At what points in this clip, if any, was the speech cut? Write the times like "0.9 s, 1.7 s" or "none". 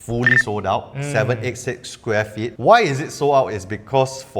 2.5 s